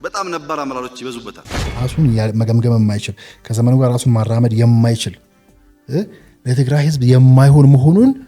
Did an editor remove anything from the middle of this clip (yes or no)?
yes